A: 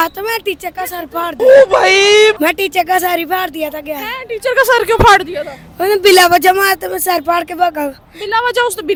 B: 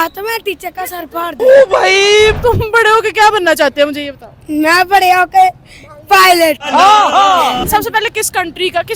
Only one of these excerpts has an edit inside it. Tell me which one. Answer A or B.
B